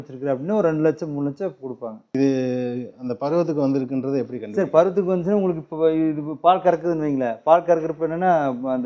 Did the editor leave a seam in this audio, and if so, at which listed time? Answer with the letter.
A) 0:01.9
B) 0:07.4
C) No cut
A